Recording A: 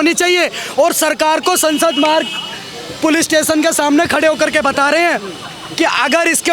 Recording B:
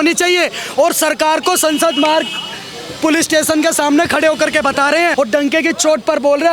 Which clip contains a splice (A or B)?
B